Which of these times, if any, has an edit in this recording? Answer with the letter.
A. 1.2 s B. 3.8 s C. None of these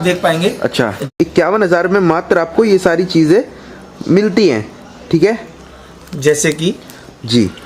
A